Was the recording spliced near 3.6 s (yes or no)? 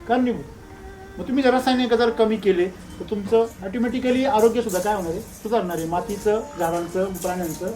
yes